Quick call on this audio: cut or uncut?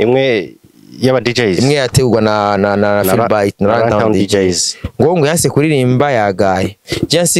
uncut